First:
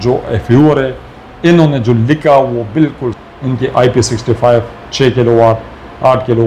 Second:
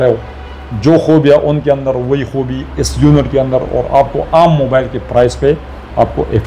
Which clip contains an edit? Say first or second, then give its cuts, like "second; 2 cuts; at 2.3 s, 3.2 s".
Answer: first; 1 cut; at 3.2 s